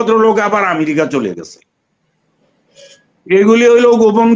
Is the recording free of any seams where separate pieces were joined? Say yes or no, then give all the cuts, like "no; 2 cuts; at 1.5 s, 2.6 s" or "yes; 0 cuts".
yes; 0 cuts